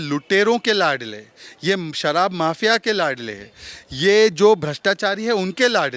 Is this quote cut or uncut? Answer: uncut